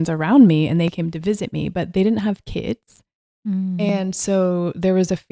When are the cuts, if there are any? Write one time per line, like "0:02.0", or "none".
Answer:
none